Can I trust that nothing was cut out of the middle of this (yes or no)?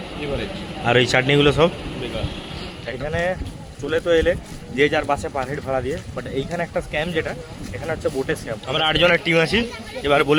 no